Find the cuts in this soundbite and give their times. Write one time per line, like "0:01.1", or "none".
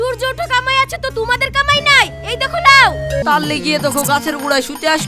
0:03.2